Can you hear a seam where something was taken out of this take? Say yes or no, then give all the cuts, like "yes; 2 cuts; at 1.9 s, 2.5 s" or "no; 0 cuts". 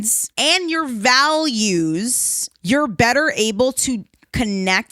no; 0 cuts